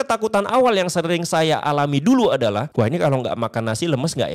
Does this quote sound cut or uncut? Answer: cut